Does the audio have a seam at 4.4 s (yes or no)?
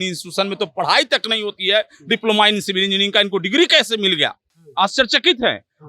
no